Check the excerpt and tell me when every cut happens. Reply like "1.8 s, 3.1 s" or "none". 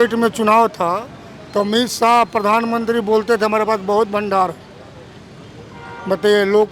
none